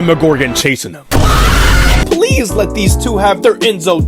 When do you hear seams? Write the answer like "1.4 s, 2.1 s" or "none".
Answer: 2.0 s